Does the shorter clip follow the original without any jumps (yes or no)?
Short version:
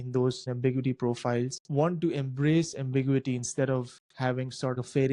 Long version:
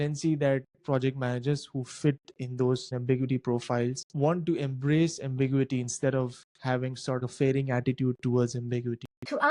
yes